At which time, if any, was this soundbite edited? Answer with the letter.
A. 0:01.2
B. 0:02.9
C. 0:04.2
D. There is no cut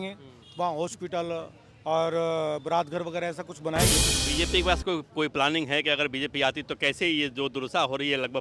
C